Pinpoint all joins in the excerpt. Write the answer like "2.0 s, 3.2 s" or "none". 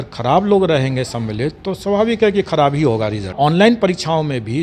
3.3 s